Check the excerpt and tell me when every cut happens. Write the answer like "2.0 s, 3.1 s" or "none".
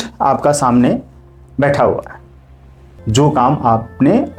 2.9 s